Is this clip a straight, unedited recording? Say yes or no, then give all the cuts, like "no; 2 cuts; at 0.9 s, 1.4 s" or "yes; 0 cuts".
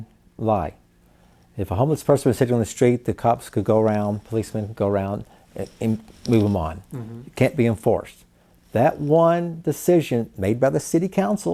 yes; 0 cuts